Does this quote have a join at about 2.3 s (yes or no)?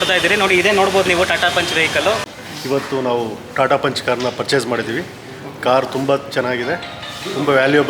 yes